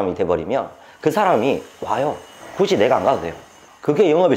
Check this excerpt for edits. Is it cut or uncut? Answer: uncut